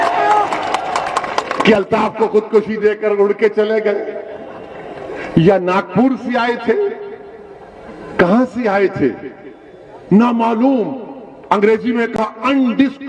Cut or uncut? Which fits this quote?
uncut